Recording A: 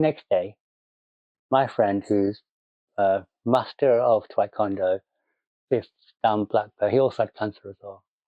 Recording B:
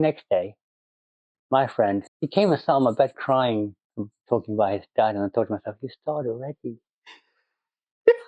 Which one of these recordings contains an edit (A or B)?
B